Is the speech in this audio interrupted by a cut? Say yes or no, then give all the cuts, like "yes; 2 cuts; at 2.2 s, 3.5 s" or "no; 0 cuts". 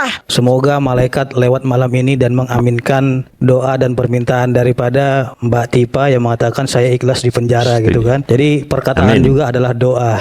no; 0 cuts